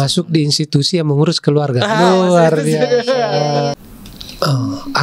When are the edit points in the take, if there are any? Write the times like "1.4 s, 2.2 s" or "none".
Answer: 3.7 s